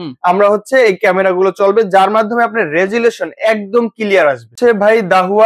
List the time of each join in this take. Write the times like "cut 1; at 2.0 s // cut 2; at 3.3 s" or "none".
cut 1; at 4.5 s